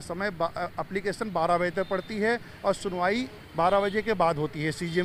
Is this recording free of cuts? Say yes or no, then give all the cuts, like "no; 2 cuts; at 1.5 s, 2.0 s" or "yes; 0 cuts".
yes; 0 cuts